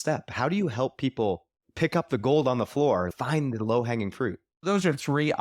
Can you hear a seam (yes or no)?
yes